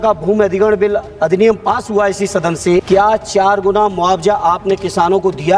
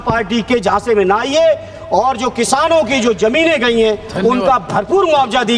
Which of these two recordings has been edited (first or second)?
first